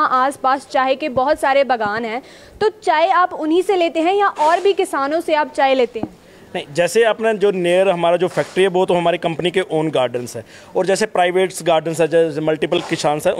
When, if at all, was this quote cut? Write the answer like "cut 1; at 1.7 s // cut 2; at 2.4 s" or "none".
none